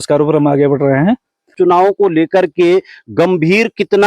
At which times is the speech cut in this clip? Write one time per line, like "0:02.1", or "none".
0:01.5